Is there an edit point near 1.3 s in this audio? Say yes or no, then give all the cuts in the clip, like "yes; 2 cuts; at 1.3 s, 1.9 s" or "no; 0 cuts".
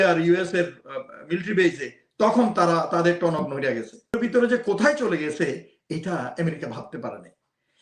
no; 1 cut; at 4.2 s